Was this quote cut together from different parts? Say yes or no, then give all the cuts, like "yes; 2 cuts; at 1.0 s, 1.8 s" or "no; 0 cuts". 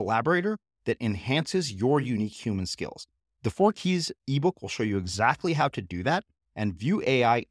no; 0 cuts